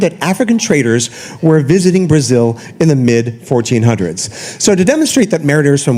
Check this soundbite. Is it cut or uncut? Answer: uncut